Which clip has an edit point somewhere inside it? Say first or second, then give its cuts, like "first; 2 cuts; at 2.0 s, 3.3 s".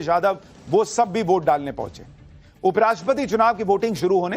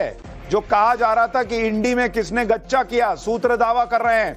first; 1 cut; at 2.8 s